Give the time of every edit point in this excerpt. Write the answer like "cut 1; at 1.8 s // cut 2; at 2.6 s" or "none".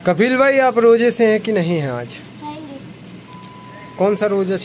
none